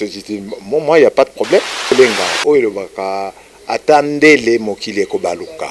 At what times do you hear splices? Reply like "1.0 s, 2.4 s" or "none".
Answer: 1.9 s